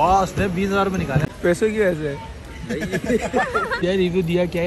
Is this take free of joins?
no; 2 cuts; at 1.3 s, 3.7 s

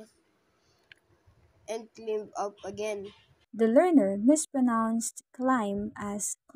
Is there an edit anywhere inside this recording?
no; 0 cuts

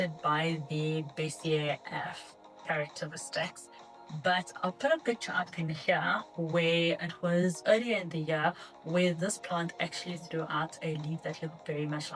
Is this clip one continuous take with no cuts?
yes; 0 cuts

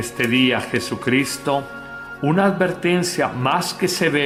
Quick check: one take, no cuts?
yes; 0 cuts

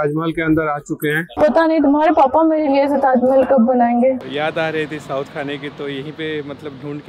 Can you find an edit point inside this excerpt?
yes; 2 cuts; at 1.3 s, 4.2 s

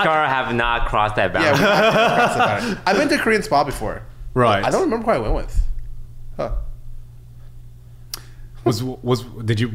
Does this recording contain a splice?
no; 0 cuts

